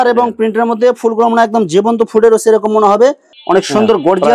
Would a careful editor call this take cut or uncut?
cut